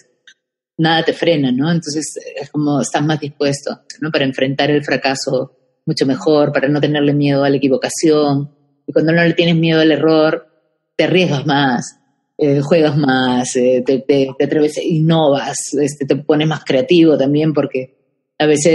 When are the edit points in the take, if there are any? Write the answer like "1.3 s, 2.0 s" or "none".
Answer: 4.0 s